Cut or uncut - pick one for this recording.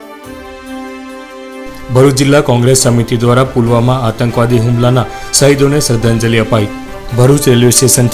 cut